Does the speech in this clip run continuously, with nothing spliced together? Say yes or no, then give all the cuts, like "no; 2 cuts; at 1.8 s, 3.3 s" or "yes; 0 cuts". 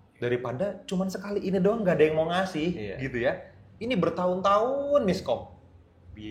yes; 0 cuts